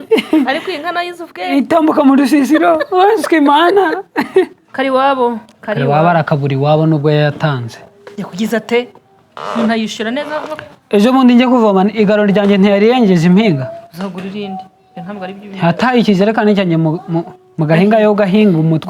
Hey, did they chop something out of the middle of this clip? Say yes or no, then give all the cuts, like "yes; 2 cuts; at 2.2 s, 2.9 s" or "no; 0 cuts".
yes; 1 cut; at 4.6 s